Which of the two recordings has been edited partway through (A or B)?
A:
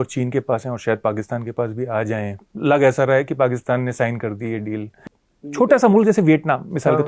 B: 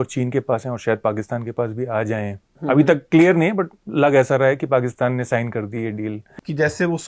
A